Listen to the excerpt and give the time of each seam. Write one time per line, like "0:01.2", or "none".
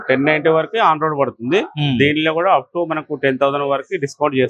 none